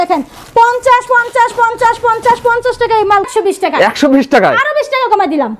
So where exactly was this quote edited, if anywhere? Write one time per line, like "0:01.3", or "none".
0:03.3